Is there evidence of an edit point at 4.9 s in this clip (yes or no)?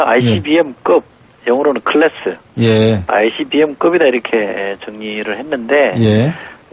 yes